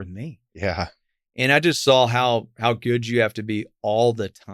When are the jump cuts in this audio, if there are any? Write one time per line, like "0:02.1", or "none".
none